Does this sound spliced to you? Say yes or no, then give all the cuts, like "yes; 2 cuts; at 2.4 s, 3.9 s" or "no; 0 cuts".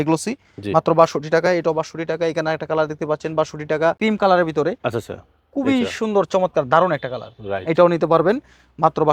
yes; 1 cut; at 4.0 s